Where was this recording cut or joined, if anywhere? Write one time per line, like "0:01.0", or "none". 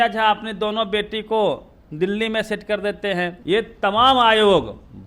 0:03.4